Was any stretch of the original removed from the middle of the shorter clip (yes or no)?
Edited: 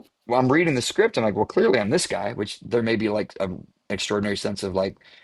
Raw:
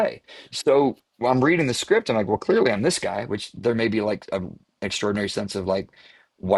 no